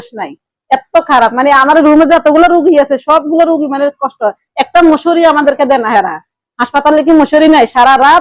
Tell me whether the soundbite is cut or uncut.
uncut